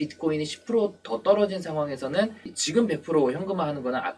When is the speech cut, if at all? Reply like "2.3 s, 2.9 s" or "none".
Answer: 2.5 s